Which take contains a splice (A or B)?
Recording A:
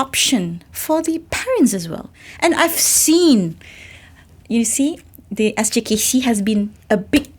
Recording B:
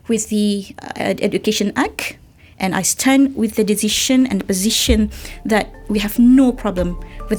A